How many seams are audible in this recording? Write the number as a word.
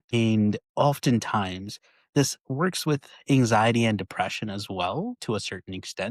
zero